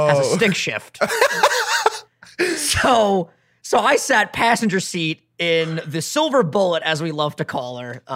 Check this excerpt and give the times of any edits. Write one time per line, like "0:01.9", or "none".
none